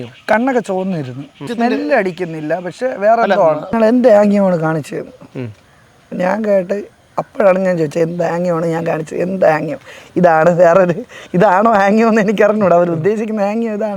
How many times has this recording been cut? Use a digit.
2